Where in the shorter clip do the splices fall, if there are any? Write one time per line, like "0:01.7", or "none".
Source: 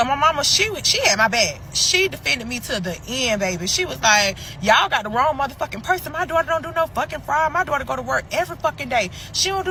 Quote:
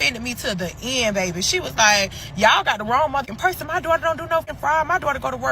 0:03.3
0:04.5